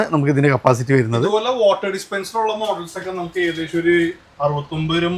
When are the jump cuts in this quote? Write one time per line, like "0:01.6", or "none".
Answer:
none